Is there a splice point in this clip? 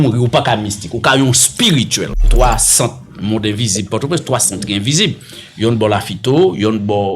yes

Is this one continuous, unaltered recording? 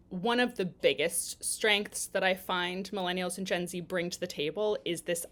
yes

